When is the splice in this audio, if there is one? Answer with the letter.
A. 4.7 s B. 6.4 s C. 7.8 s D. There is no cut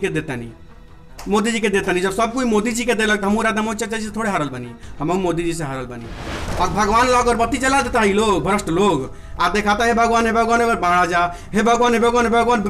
B